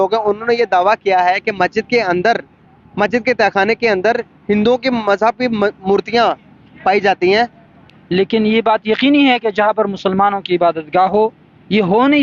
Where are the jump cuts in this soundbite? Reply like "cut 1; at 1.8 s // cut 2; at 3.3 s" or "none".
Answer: cut 1; at 7.7 s